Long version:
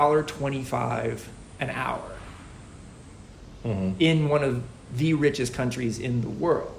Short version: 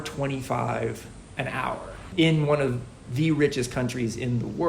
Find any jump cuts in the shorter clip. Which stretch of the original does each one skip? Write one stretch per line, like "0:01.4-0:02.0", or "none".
0:02.4-0:04.0